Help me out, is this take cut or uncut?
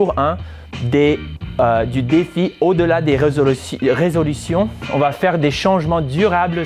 uncut